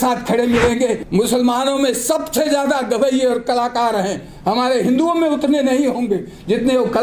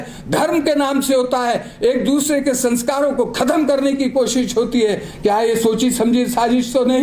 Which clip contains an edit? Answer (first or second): first